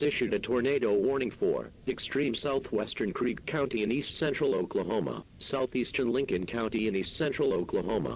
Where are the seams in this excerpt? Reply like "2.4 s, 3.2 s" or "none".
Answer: none